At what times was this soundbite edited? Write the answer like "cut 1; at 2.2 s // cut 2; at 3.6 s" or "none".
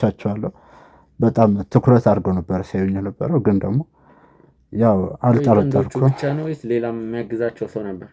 none